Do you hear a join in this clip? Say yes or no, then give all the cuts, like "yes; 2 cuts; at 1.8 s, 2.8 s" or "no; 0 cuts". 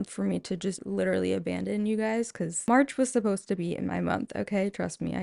yes; 2 cuts; at 0.8 s, 2.7 s